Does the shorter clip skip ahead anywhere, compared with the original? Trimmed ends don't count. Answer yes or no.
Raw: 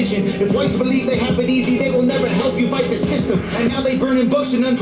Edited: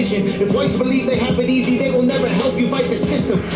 no